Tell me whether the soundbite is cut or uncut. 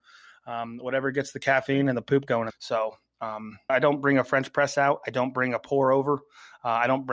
uncut